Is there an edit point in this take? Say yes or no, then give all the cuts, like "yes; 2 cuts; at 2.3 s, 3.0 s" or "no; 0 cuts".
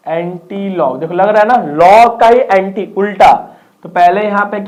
no; 0 cuts